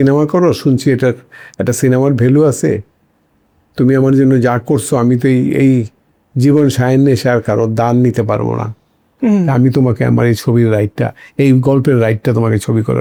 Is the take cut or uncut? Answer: uncut